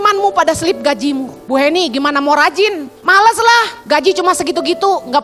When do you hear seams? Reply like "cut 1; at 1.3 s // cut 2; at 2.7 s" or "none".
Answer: cut 1; at 1.3 s // cut 2; at 2.9 s // cut 3; at 3.8 s